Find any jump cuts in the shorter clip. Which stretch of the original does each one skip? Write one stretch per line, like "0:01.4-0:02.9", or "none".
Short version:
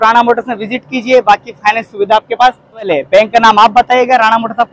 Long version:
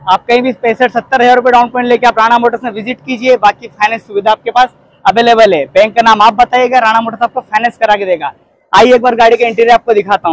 0:05.0-0:05.5

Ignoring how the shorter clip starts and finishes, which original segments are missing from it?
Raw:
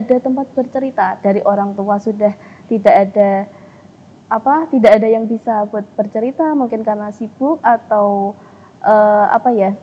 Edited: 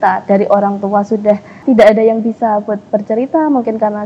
0:02.6-0:04.7

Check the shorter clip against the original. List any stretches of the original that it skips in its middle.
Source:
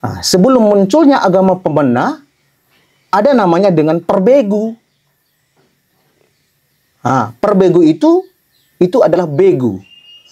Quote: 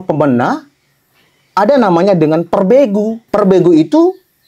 0:04.8-0:07.3

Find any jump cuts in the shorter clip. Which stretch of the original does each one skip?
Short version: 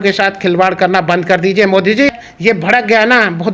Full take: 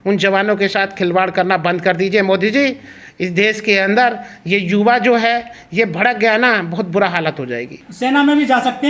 0:02.8-0:05.6

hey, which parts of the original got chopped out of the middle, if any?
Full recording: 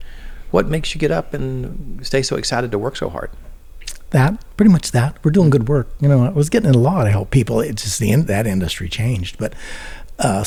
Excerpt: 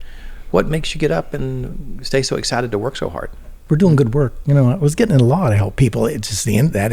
0:03.6-0:05.1

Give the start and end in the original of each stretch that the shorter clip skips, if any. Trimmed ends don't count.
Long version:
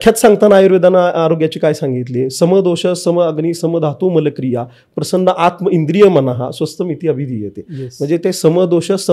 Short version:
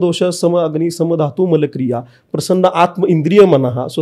none

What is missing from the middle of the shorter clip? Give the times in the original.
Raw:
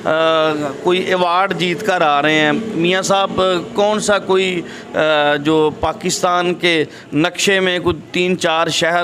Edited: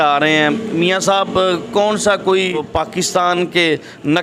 0:04.7-0:05.7

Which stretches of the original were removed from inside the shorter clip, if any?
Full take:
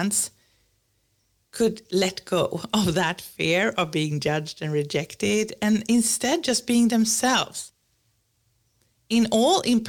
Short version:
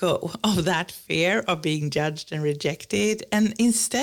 none

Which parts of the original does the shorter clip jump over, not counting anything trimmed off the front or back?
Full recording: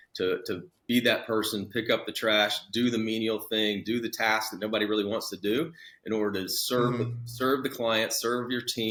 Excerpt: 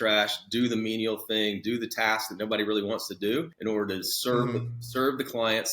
0:05.7-0:06.0

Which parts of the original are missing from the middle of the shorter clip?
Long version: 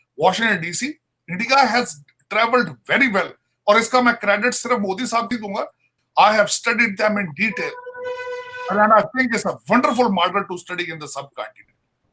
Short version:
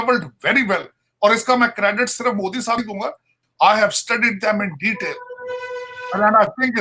0:05.4-0:05.5

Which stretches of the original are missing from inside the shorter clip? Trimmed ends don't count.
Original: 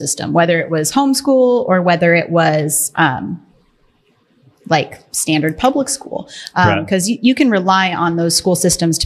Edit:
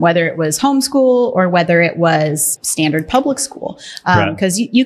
0:02.8-0:05.0

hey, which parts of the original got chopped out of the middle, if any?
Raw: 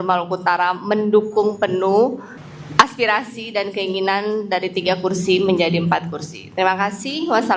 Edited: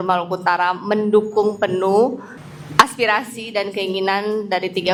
none

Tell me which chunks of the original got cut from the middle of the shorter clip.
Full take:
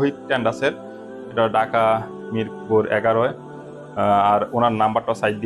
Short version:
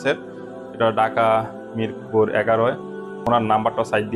0:03.8-0:04.5

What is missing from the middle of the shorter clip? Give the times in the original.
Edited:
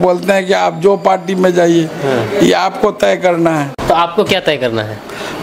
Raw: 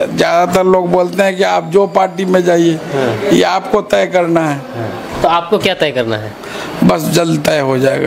0:04.6-0:05.1

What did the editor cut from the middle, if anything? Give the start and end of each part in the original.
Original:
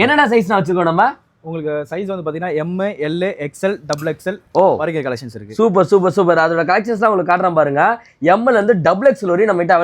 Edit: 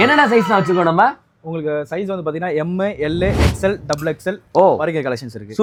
none

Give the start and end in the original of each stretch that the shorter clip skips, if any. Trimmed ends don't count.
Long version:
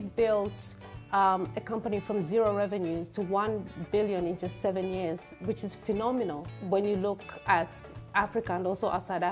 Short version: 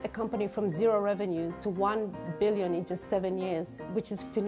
none

